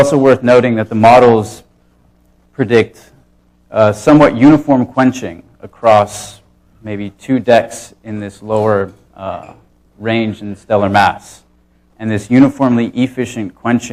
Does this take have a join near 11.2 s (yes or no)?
no